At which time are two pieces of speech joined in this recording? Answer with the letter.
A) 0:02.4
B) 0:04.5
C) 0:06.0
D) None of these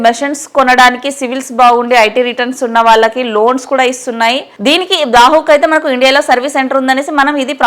B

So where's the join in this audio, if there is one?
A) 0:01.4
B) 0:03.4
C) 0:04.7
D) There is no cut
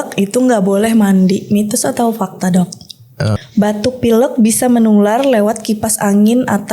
B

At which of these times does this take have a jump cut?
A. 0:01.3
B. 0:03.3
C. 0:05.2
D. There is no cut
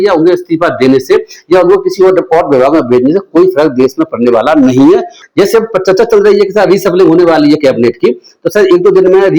C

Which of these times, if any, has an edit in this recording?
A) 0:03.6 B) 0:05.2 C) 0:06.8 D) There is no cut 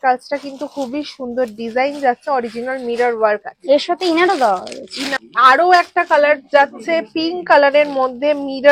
B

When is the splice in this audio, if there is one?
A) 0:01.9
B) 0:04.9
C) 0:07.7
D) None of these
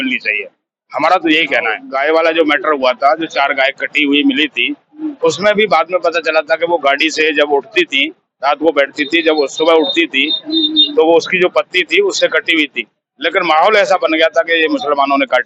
A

